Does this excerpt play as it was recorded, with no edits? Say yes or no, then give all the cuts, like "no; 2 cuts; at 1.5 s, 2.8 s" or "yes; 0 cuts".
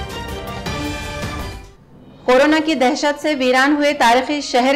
no; 1 cut; at 1.5 s